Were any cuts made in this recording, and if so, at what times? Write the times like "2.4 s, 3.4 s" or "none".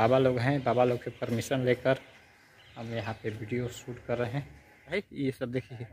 5.0 s